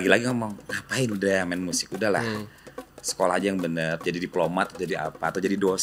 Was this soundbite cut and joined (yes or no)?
no